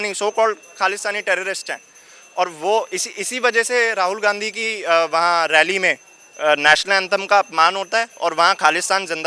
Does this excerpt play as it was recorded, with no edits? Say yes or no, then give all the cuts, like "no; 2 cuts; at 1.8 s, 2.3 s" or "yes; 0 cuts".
yes; 0 cuts